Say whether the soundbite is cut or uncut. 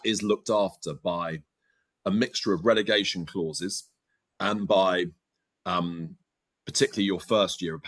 uncut